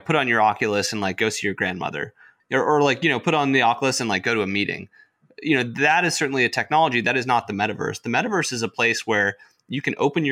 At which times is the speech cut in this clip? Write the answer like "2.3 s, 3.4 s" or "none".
2.3 s